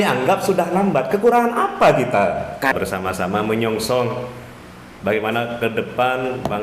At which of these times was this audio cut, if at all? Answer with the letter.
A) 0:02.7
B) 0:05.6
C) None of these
A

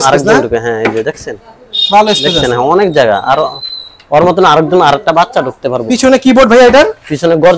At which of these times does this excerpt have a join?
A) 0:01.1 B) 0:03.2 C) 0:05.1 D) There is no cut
D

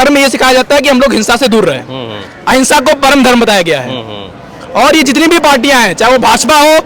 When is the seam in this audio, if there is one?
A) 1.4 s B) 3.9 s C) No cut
C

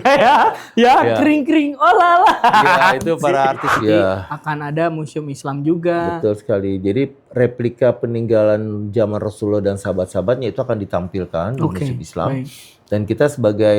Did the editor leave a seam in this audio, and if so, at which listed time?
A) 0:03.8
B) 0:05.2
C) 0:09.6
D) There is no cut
A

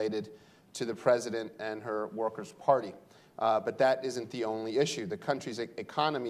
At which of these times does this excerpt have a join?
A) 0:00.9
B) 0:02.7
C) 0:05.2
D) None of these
C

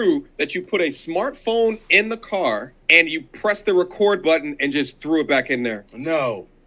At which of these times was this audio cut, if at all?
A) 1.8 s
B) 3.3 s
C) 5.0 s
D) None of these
D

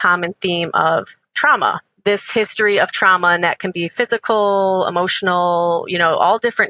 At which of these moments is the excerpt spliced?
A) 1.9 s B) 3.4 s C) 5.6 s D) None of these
A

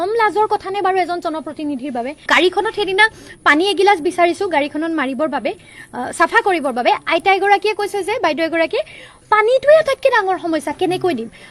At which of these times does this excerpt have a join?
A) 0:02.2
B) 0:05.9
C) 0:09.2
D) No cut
A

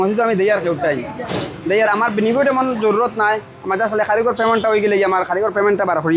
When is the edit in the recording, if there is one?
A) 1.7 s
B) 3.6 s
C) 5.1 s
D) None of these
D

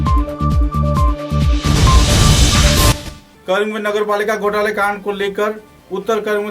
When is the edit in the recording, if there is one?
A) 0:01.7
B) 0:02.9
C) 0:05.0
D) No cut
B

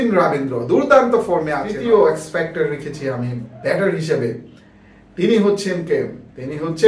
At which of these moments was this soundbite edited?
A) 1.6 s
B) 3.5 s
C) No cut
A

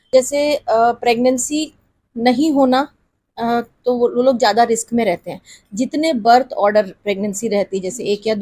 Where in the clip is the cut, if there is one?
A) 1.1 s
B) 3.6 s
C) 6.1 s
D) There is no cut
D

